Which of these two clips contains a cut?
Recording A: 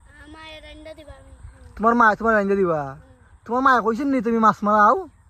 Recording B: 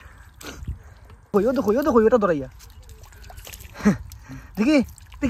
B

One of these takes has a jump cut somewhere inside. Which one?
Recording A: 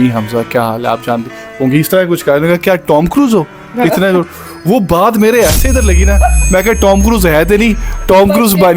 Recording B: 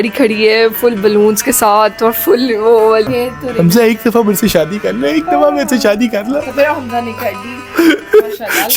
B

